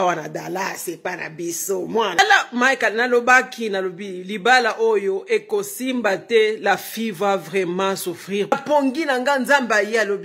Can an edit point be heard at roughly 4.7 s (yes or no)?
no